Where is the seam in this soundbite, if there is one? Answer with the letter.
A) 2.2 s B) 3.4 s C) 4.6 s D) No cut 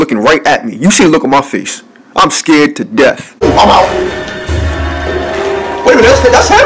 B